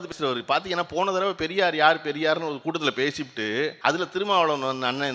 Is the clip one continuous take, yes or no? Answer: no